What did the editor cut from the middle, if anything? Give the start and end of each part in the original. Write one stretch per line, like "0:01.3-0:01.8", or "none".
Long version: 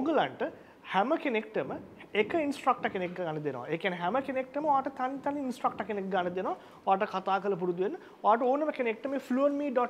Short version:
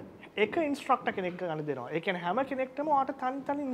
none